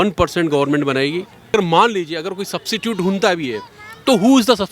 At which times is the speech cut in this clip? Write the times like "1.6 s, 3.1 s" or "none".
1.5 s